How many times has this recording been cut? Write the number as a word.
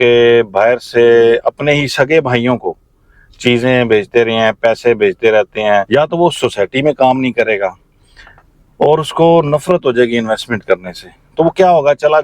one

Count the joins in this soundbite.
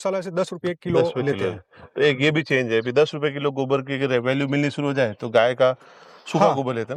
zero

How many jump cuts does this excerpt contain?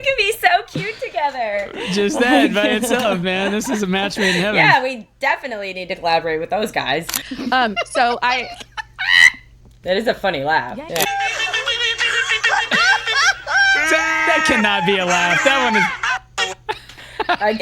two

